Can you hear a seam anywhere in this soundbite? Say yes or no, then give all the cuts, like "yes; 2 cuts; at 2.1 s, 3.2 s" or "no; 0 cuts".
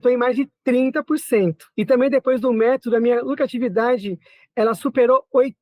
yes; 1 cut; at 1.6 s